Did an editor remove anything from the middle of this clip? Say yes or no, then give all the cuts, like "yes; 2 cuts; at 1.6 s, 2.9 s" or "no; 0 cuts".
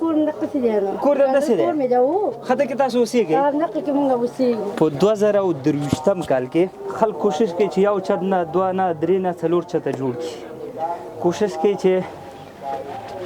yes; 1 cut; at 6.8 s